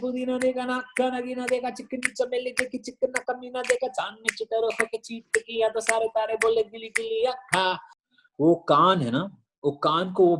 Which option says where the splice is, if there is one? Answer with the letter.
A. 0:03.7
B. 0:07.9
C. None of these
B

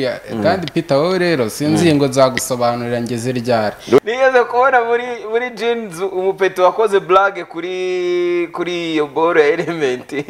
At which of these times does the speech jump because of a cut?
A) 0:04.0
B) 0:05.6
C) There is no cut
A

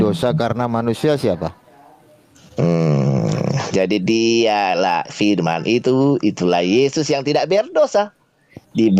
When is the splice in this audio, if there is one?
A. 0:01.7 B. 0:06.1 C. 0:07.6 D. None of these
D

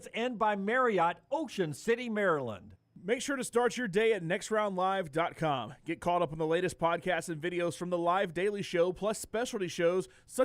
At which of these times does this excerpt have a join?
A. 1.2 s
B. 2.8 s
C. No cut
B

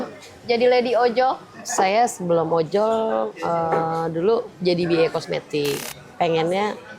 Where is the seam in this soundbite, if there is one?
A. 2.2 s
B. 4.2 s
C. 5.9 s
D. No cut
C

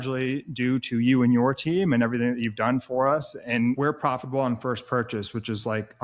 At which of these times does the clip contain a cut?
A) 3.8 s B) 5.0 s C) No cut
A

